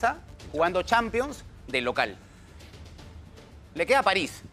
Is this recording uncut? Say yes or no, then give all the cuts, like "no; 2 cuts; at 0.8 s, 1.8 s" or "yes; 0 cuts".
yes; 0 cuts